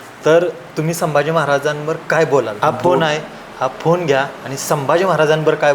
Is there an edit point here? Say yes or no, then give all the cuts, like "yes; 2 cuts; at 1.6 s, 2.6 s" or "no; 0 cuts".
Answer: yes; 1 cut; at 2.5 s